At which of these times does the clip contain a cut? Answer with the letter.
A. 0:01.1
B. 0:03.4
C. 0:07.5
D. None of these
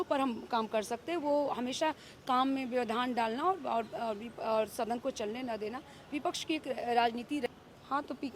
C